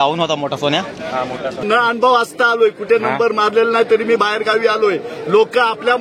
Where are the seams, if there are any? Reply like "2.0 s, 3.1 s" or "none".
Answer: 1.6 s